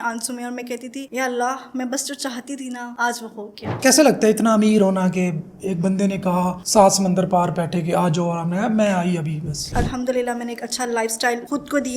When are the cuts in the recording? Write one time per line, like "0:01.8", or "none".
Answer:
0:03.6
0:09.7